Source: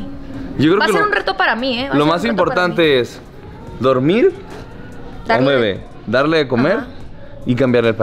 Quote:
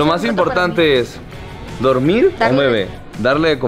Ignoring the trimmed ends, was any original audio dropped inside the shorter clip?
yes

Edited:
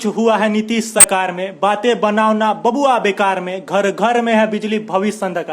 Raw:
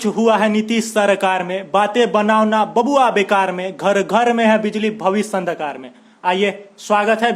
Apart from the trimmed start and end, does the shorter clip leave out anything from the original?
yes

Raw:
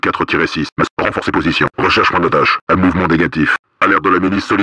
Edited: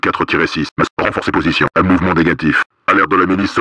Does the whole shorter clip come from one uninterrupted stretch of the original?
no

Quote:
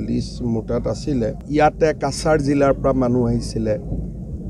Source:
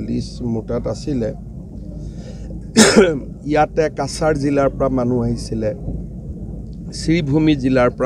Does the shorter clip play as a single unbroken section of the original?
no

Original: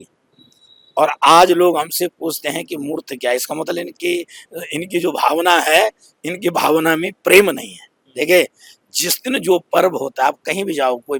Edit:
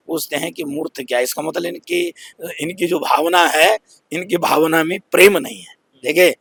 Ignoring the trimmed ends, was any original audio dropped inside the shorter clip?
no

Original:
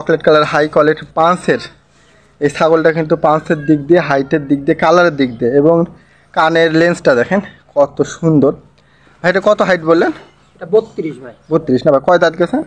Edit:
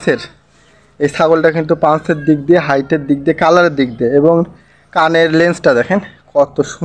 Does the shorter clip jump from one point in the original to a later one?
no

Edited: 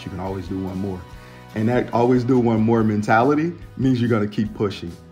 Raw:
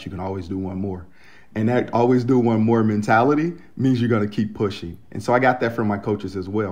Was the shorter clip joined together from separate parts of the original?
no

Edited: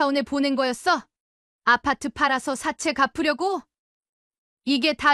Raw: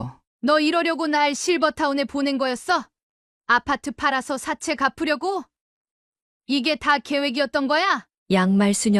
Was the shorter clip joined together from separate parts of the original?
no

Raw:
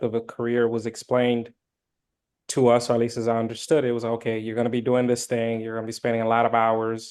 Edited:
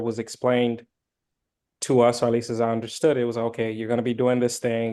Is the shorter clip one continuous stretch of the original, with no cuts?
yes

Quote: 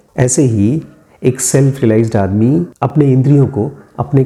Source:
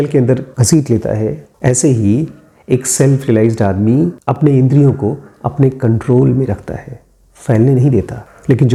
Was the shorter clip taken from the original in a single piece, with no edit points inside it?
yes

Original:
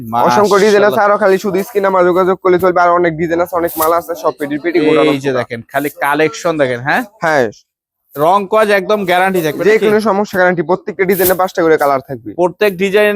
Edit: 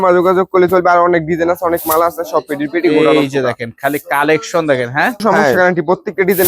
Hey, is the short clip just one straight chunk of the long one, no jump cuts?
no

